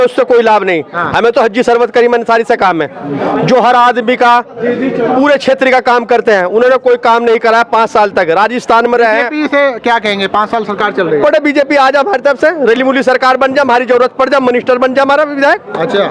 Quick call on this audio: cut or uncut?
uncut